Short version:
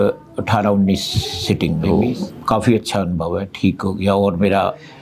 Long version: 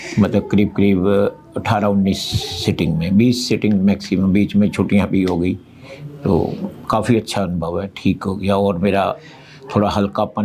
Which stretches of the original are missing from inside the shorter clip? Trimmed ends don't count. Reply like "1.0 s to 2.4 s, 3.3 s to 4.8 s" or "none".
3.0 s to 6.2 s

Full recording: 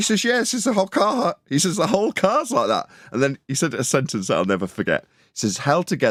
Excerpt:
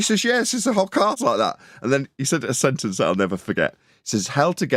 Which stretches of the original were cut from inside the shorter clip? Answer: 1.1 s to 2.4 s

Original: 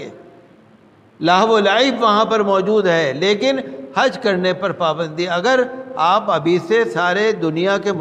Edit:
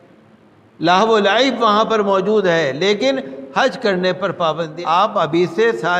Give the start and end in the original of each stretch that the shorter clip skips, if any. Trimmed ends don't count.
5.1 s to 5.8 s

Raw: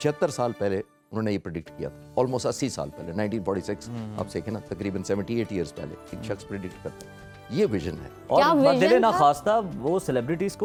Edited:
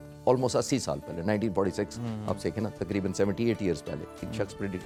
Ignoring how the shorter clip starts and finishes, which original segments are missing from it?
none

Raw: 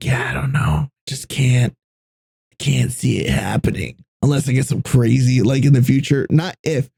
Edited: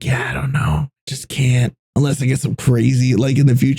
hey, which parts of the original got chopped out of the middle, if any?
1.8 s to 4.1 s

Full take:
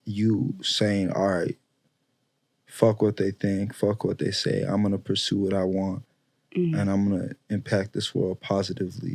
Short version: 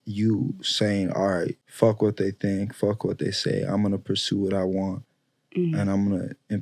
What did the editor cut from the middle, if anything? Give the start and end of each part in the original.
1.6 s to 2.6 s

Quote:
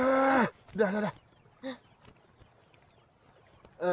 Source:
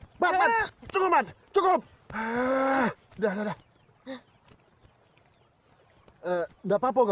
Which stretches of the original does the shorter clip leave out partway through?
none

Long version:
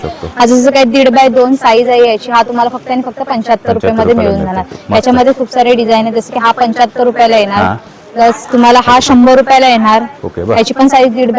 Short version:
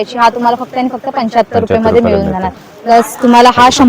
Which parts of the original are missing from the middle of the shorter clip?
4.7 s to 7.9 s

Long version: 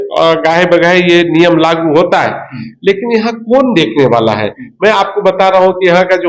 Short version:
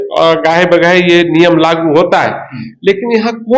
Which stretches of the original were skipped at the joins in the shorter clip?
none

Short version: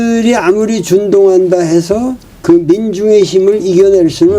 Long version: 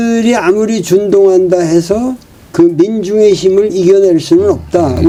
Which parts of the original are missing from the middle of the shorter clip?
2.2 s to 2.4 s

